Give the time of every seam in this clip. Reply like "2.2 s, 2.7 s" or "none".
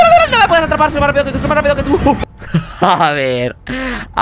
2.2 s